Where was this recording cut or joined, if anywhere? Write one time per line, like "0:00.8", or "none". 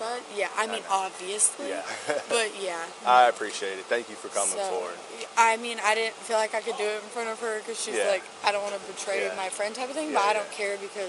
none